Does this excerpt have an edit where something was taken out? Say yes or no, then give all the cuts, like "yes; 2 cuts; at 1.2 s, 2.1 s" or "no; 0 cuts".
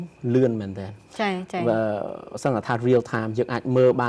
no; 0 cuts